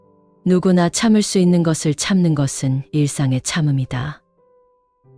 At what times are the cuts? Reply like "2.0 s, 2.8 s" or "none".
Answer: 4.2 s